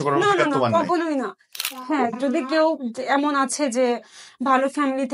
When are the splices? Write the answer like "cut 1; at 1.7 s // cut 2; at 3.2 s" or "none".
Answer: cut 1; at 1.6 s